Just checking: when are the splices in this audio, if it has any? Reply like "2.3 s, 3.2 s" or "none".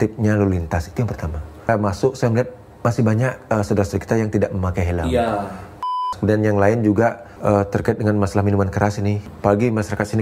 1.7 s, 6.0 s, 7.3 s, 9.2 s